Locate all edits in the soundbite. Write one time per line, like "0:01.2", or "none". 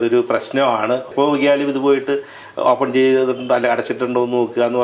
0:01.1